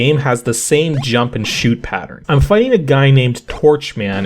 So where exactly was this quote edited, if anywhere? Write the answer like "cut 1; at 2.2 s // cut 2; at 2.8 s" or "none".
cut 1; at 2.1 s